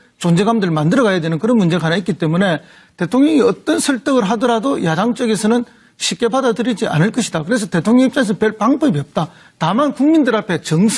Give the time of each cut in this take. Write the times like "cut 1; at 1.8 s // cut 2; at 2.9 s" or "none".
none